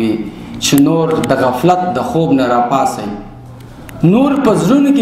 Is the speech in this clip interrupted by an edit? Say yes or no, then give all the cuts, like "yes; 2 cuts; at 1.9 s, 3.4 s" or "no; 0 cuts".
no; 0 cuts